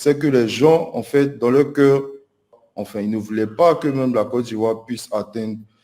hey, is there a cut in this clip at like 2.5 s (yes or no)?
yes